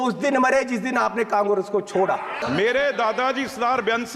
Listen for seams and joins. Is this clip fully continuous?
no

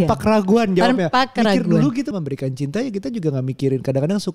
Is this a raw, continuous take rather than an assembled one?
no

